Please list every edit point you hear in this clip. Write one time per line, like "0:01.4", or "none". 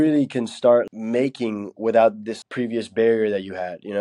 0:00.9
0:02.3